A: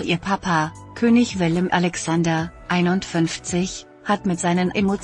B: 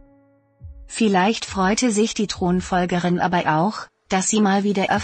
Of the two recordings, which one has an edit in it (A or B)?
B